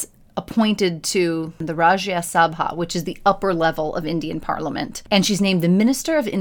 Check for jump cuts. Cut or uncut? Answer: cut